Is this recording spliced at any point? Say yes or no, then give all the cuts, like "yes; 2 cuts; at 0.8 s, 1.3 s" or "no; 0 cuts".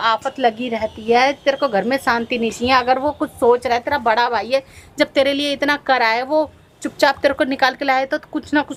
no; 0 cuts